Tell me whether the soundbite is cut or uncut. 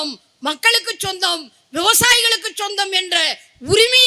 uncut